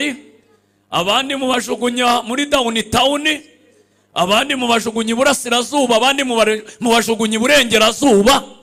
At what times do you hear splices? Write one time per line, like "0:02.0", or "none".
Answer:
none

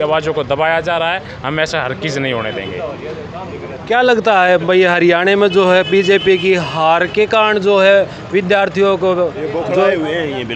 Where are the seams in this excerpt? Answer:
none

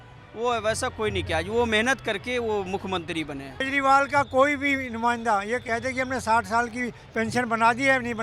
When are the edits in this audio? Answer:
0:03.6

